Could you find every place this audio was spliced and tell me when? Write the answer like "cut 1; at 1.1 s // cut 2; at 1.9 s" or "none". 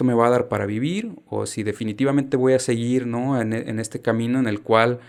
none